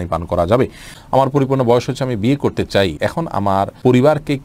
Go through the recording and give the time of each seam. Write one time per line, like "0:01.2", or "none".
0:00.9
0:03.4